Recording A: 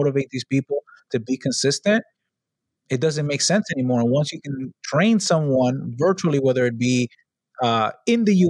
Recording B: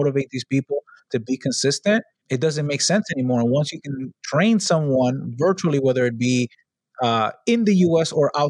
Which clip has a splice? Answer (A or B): B